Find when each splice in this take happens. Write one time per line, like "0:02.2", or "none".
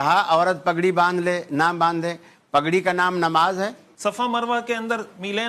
0:03.9